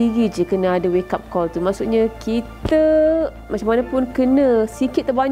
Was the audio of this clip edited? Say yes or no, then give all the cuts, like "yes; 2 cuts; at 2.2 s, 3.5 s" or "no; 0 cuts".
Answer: no; 0 cuts